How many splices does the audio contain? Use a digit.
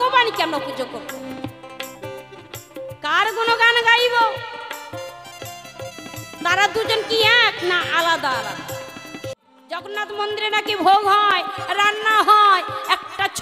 1